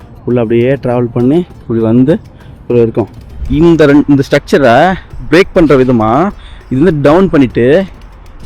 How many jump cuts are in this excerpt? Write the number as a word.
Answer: one